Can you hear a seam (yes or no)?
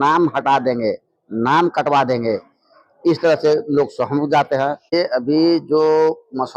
yes